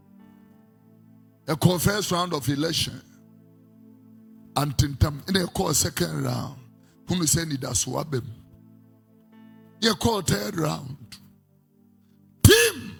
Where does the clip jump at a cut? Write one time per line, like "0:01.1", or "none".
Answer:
none